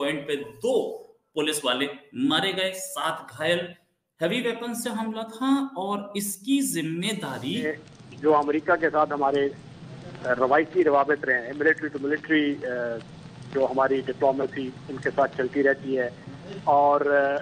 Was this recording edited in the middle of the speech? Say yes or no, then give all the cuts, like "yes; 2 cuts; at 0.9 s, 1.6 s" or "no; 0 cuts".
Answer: yes; 1 cut; at 7.7 s